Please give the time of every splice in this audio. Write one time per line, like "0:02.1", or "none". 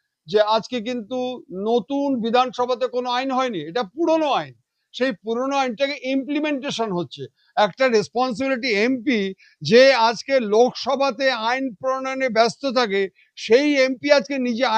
none